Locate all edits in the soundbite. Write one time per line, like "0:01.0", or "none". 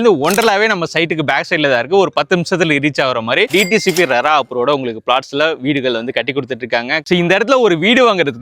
0:03.5
0:07.0